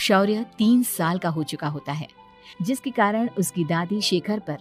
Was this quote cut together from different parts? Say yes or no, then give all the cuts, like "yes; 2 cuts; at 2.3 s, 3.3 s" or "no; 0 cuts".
no; 0 cuts